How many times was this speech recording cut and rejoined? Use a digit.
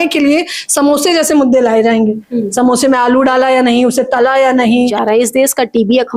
1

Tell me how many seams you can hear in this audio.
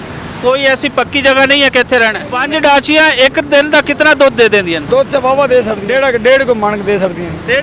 3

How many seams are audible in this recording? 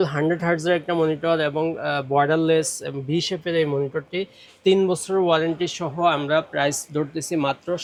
0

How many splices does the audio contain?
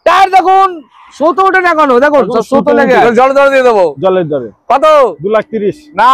1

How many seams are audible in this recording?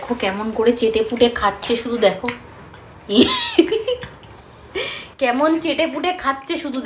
0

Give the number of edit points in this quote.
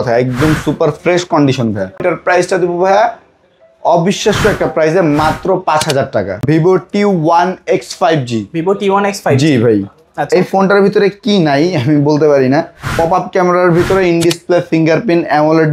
3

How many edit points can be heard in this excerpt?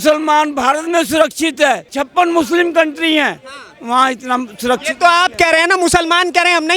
1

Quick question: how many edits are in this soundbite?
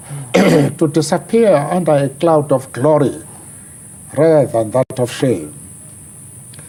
0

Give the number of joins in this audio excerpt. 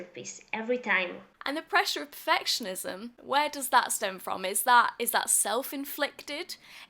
2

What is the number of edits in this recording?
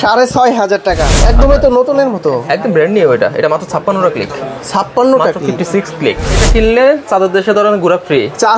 2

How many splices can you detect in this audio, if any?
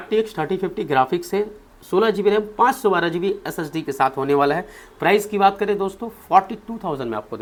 0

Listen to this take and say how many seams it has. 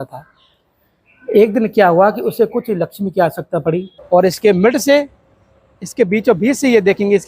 1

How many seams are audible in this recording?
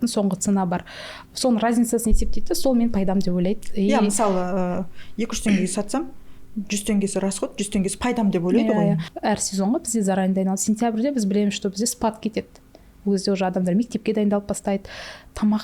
1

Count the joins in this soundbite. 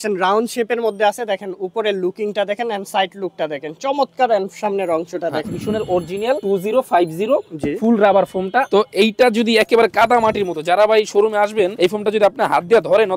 4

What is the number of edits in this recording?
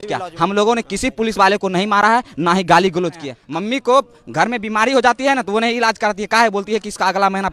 1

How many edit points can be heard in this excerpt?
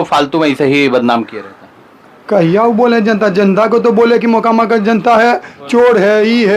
0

